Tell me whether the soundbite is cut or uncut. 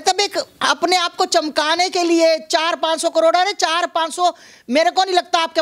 uncut